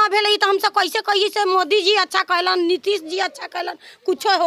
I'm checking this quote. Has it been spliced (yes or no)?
no